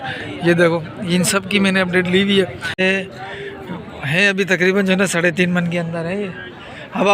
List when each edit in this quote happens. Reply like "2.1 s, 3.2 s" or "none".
2.8 s

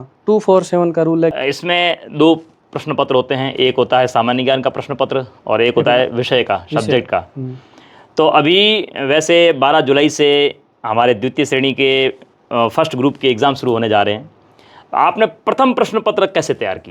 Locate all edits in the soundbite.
1.4 s

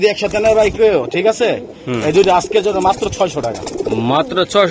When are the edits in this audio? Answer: none

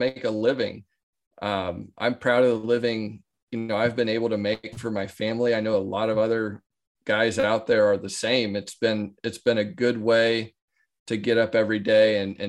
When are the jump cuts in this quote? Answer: none

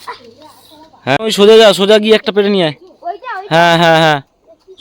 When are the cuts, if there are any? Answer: 1.2 s

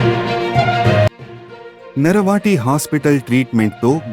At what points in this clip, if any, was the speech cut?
1.1 s

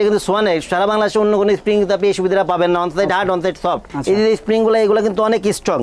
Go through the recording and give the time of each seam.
3.9 s

